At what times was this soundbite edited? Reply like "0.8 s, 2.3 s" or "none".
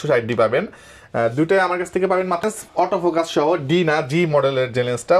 2.4 s